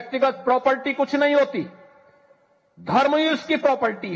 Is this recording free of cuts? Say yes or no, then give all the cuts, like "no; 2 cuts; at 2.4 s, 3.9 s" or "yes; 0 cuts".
yes; 0 cuts